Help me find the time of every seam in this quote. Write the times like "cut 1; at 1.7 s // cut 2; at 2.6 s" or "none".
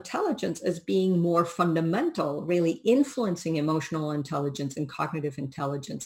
none